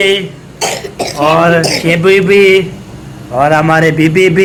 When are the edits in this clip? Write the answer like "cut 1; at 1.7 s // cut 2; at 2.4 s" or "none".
none